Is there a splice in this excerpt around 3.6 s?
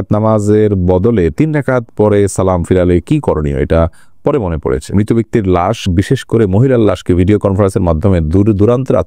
no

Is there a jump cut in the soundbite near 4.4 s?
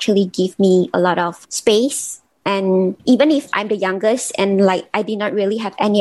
no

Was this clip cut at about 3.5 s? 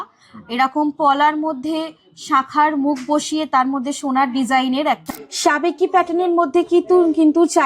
no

